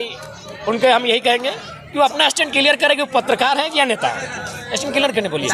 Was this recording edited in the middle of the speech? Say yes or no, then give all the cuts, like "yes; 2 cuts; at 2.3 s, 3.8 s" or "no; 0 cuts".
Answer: no; 0 cuts